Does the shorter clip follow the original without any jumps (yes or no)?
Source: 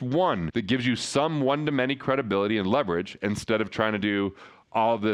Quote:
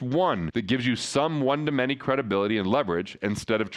yes